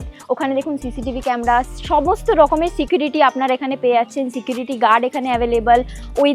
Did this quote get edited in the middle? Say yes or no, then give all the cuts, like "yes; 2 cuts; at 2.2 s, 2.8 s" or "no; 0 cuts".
no; 0 cuts